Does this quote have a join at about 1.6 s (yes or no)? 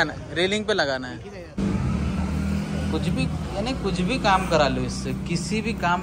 yes